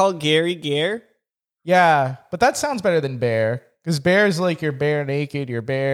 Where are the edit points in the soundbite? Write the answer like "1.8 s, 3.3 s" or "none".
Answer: none